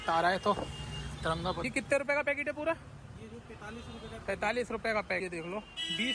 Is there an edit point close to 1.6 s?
yes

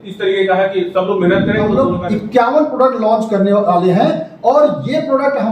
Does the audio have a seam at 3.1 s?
no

